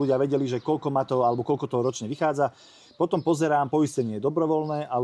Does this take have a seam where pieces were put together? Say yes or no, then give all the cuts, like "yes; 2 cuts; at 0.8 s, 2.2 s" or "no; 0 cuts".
no; 0 cuts